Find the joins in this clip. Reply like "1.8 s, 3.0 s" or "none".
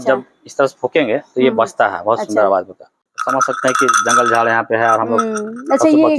3.1 s